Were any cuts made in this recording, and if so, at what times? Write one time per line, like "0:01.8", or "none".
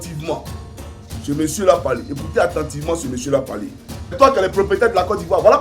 0:04.2